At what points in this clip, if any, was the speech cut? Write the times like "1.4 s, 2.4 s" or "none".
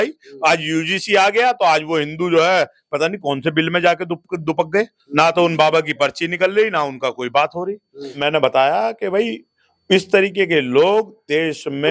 none